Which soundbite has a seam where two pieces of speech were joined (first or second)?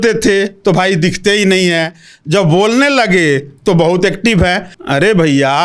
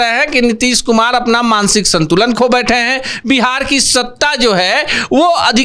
first